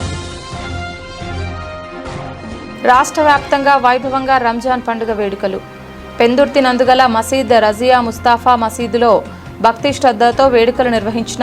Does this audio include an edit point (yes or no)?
yes